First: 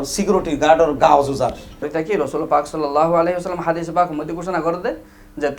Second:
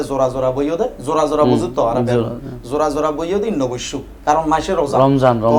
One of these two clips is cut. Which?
first; 1 cut; at 1.8 s

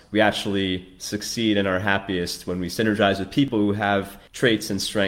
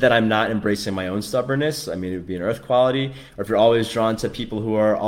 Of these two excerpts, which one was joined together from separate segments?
first; 1 cut; at 3.8 s

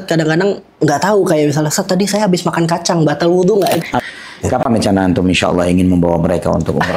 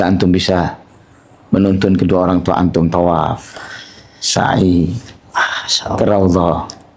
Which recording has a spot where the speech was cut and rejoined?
first; 1 cut; at 3.8 s

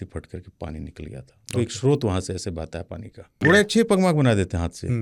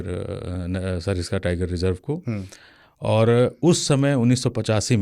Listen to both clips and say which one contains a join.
first; 1 cut; at 3.3 s

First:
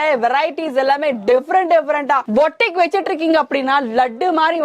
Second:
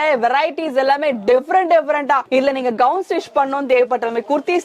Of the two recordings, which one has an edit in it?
first; 1 cut; at 2.2 s

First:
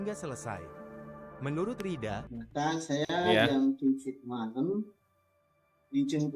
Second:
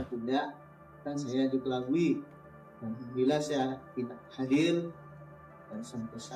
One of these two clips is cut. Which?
first; 1 cut; at 2.3 s

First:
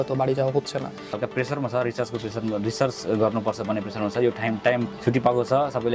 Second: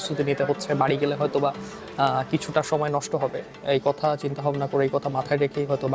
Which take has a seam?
first; 2 cuts; at 1.2 s, 4.9 s

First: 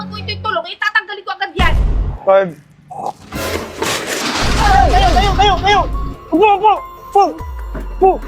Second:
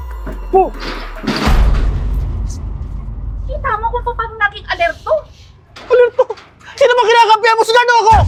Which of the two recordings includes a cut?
first; 1 cut; at 2.1 s

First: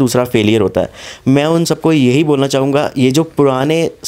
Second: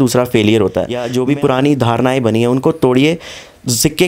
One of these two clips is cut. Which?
second; 1 cut; at 1.0 s

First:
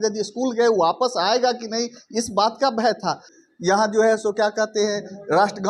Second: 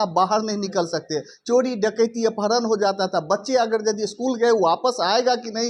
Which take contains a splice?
first; 1 cut; at 3.3 s

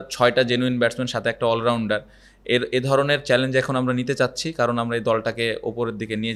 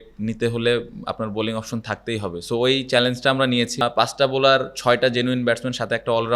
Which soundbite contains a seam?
second; 1 cut; at 3.7 s

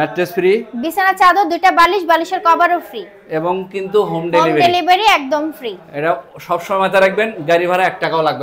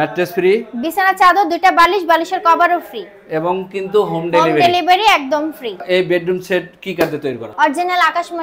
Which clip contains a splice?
second; 2 cuts; at 5.8 s, 7.5 s

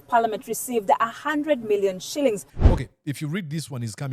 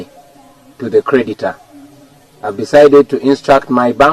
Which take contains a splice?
first; 1 cut; at 2.5 s

